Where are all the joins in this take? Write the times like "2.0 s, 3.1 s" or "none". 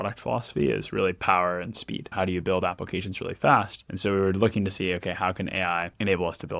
2.1 s, 3.8 s

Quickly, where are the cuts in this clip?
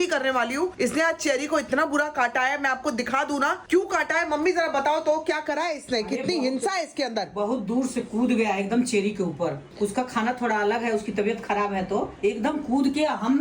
none

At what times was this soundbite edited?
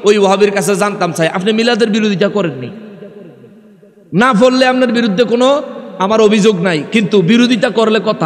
none

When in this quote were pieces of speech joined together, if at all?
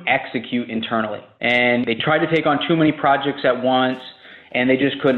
1.3 s

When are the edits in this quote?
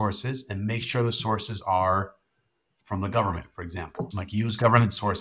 2.8 s, 4.2 s

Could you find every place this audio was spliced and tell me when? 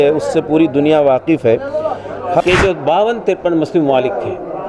2.4 s

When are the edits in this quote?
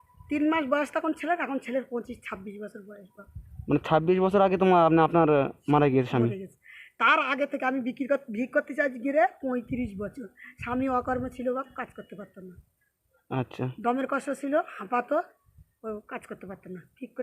none

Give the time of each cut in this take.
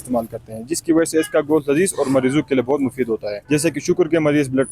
3.3 s

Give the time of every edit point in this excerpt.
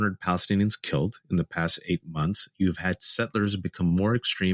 none

